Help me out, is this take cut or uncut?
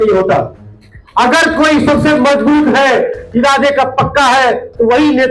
uncut